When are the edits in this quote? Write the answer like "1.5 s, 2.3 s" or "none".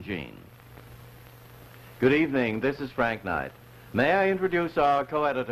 2.1 s